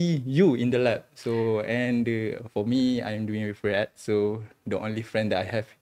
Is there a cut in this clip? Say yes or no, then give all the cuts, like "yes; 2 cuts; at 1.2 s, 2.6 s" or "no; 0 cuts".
no; 0 cuts